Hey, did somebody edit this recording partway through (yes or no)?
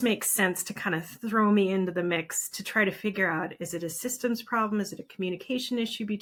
no